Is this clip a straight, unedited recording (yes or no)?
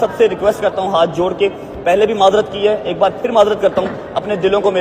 yes